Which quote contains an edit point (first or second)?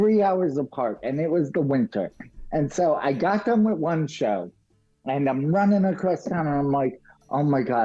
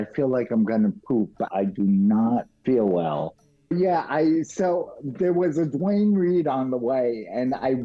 second